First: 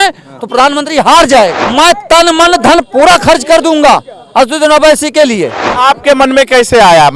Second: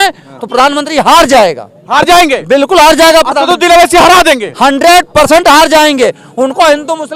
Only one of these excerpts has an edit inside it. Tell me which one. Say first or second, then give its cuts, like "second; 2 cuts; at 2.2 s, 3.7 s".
first; 2 cuts; at 1.6 s, 5.6 s